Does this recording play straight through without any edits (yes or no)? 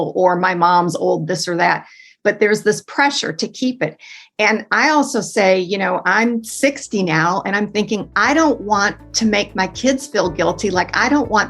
yes